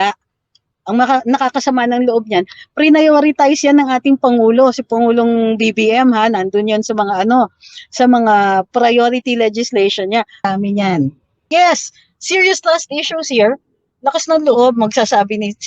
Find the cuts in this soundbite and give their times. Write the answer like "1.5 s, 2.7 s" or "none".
10.5 s